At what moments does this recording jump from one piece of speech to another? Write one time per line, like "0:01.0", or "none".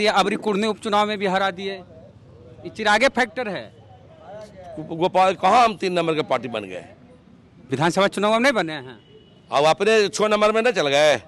none